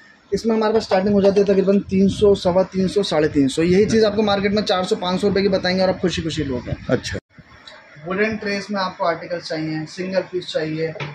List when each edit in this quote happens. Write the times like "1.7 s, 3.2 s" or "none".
7.2 s